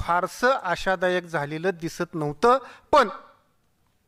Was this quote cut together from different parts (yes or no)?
no